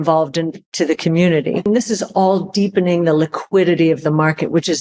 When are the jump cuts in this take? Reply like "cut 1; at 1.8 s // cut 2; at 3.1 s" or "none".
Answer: cut 1; at 1.6 s

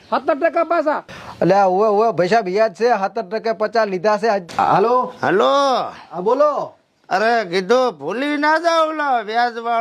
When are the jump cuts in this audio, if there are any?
cut 1; at 4.4 s

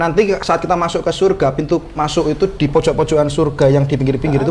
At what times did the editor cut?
none

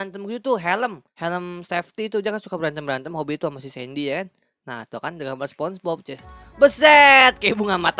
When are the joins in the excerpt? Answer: cut 1; at 1.1 s

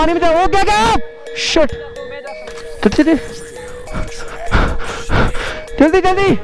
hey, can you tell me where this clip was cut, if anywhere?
none

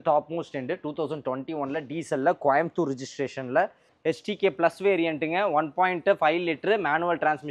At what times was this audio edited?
cut 1; at 3.9 s

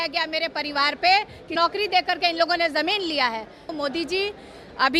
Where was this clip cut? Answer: cut 1; at 1.5 s // cut 2; at 3.7 s

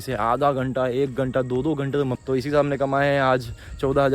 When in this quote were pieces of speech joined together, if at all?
cut 1; at 2.2 s

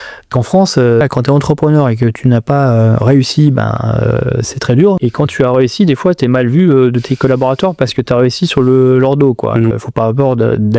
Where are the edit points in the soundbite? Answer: cut 1; at 1.0 s // cut 2; at 5.0 s // cut 3; at 9.7 s

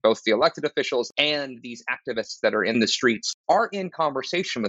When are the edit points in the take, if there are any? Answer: cut 1; at 1.1 s // cut 2; at 3.0 s

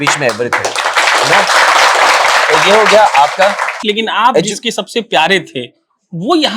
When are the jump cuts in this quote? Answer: cut 1; at 3.8 s

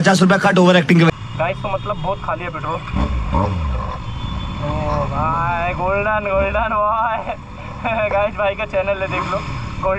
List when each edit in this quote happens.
none

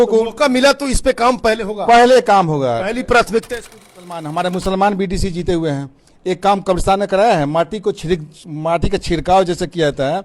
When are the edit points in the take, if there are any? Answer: cut 1; at 4.0 s

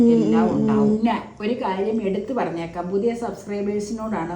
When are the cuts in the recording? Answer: cut 1; at 1.0 s

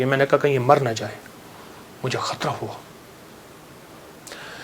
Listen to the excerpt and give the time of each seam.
none

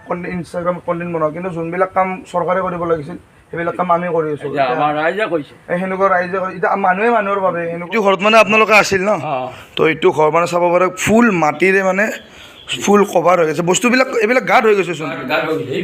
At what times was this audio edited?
cut 1; at 7.9 s

